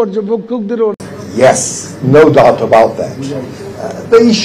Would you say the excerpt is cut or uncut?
cut